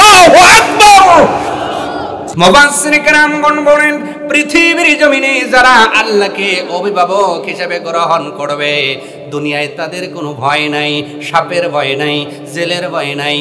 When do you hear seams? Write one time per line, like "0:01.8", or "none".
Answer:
0:02.2